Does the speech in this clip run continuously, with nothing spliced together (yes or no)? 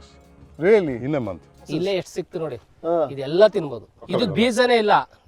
no